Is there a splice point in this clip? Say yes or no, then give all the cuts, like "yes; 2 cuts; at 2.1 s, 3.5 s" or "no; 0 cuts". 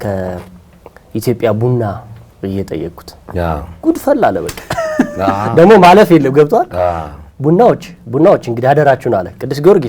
no; 0 cuts